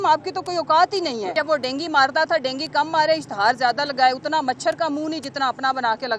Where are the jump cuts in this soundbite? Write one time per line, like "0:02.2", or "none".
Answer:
0:01.3